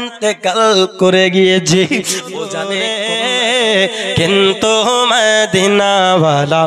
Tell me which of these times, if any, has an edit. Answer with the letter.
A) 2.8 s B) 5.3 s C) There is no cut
A